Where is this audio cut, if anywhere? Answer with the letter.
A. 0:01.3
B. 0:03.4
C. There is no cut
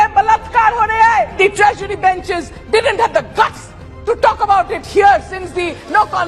A